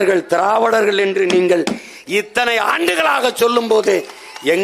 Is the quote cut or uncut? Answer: uncut